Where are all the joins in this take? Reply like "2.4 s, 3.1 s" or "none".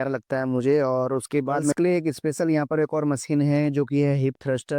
1.7 s